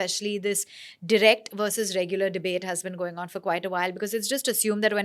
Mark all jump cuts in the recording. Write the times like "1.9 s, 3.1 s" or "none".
none